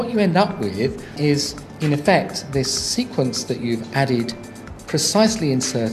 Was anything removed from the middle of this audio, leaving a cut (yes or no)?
yes